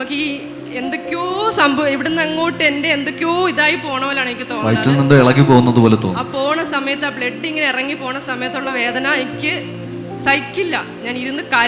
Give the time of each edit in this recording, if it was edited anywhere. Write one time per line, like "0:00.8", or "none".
none

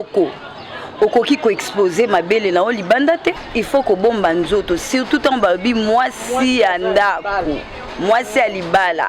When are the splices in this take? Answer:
0:03.4

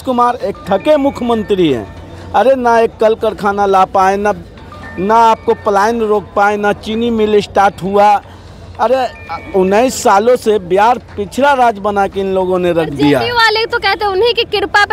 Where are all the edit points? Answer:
none

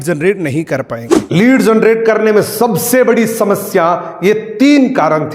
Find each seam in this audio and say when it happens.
0:01.2

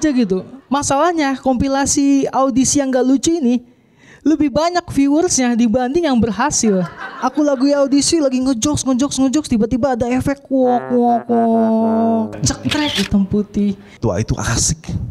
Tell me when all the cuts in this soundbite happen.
0:07.0
0:13.9

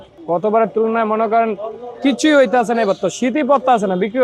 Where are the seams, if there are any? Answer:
none

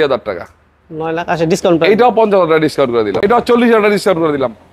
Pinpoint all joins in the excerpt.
0:03.2

